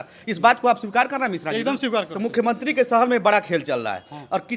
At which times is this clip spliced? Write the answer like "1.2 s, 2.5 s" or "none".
none